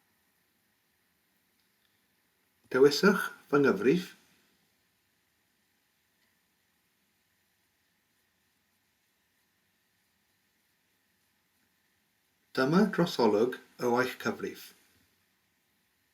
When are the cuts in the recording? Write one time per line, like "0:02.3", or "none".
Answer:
none

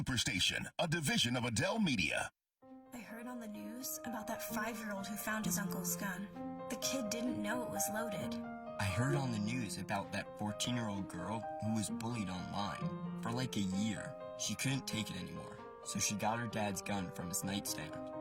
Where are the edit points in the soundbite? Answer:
0:02.5

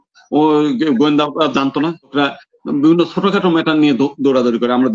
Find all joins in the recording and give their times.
0:02.1

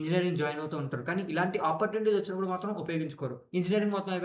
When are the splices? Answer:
none

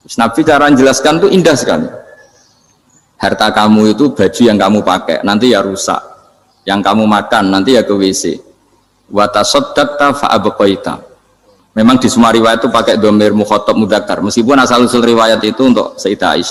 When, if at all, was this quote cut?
none

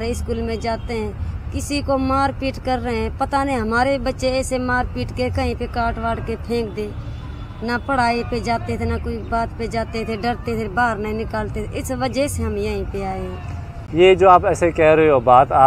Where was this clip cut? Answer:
none

